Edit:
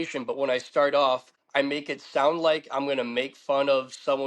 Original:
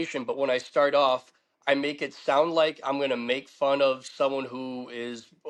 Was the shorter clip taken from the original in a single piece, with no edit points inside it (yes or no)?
no